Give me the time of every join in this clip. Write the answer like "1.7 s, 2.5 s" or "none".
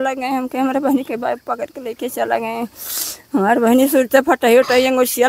none

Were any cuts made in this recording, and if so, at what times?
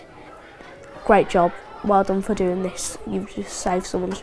1.7 s

